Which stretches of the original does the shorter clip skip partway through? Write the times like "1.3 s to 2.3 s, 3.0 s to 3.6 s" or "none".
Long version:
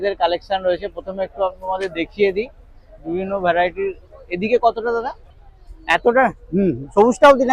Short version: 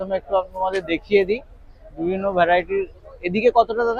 none

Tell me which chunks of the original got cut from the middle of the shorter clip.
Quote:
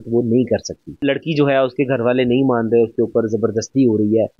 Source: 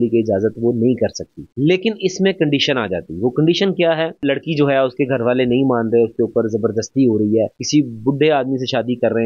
1.4 s to 4.1 s

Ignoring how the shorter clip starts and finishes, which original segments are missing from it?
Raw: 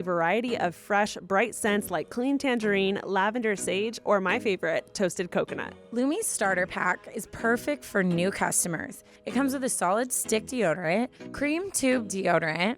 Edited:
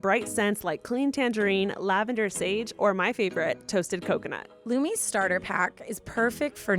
none

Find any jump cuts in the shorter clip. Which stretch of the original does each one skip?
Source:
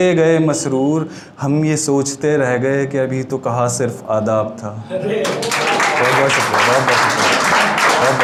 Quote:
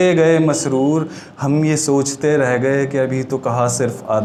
none

